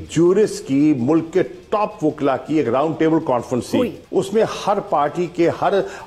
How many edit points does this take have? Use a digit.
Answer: 1